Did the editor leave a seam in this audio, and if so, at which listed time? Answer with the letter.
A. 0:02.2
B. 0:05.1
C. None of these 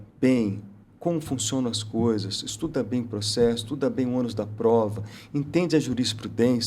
C